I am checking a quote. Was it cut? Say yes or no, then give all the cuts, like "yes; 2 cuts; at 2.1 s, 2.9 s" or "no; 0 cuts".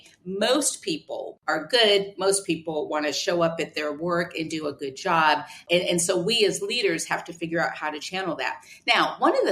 yes; 2 cuts; at 1.3 s, 5.6 s